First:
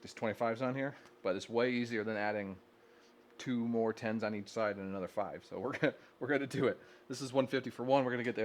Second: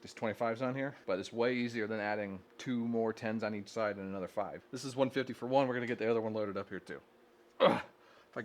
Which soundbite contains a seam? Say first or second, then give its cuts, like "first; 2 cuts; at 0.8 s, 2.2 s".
second; 3 cuts; at 1.0 s, 2.5 s, 4.6 s